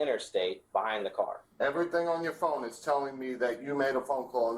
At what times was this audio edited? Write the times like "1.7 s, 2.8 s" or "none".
1.4 s